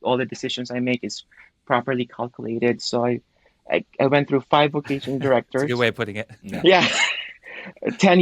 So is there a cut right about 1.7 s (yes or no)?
no